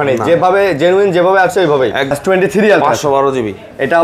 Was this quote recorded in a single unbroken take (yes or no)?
no